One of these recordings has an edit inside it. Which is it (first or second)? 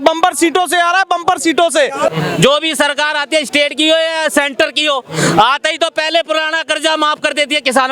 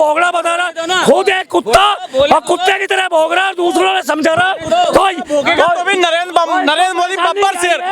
first